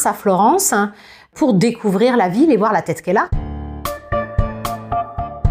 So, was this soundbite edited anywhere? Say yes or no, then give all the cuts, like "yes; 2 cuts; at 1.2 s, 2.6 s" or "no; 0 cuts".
no; 0 cuts